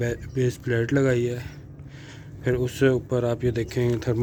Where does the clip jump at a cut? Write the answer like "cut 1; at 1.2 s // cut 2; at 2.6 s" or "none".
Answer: none